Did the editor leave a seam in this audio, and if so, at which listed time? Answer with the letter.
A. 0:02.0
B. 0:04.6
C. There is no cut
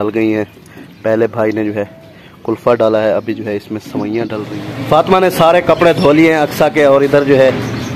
B